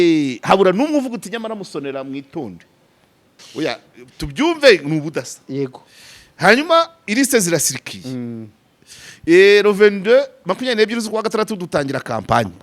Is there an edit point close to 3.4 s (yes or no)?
yes